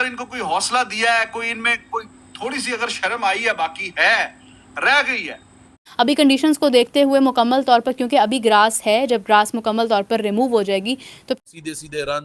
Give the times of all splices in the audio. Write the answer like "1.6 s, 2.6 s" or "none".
5.8 s, 11.4 s